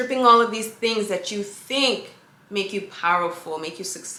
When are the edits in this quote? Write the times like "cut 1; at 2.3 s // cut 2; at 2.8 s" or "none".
none